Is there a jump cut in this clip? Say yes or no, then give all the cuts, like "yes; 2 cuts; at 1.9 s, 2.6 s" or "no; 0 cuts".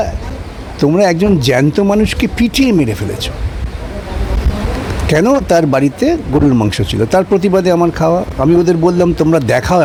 no; 0 cuts